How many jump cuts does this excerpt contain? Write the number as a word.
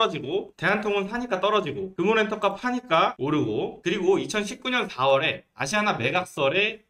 zero